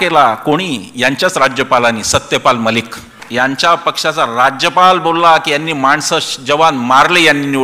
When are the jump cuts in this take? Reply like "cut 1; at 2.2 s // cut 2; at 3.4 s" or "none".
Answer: cut 1; at 3.2 s